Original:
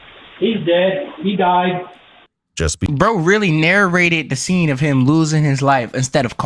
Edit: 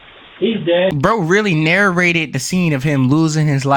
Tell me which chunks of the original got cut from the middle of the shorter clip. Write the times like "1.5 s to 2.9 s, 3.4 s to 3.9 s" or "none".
0.9 s to 2.9 s